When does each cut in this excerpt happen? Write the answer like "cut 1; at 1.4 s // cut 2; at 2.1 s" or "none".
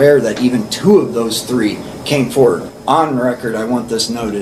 cut 1; at 2.6 s

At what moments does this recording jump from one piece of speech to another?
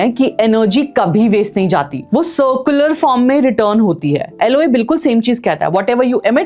none

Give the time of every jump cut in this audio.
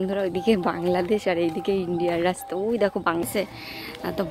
cut 1; at 3.0 s

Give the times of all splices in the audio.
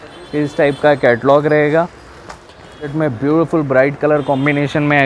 cut 1; at 2.9 s

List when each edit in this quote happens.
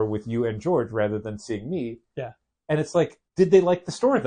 none

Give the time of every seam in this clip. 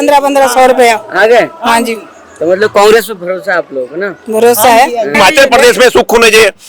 cut 1; at 5.1 s

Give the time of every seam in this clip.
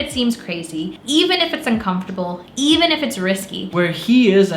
cut 1; at 0.9 s // cut 2; at 2.4 s // cut 3; at 3.7 s

